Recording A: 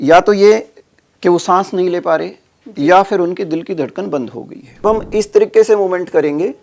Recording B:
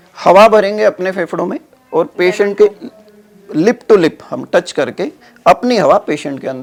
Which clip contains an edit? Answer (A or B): A